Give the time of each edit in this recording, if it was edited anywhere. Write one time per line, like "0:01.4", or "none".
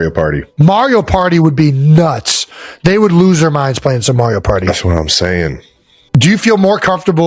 0:06.0

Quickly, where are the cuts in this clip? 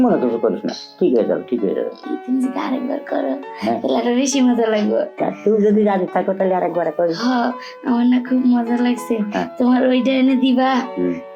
0:02.0

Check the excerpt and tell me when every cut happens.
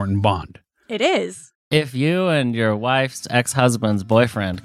0:01.5

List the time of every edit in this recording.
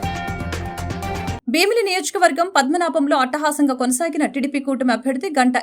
0:01.4

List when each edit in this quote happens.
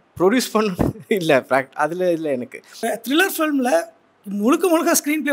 0:02.8

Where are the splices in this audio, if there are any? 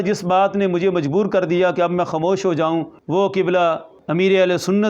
0:03.0
0:03.9

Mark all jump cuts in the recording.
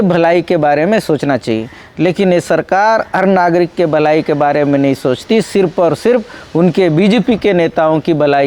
none

